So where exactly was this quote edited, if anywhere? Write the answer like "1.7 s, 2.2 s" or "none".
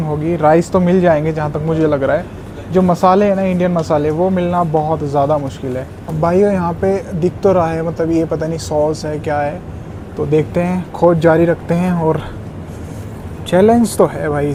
none